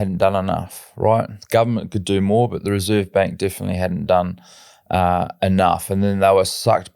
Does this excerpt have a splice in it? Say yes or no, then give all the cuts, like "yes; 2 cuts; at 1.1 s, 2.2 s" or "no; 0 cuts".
no; 0 cuts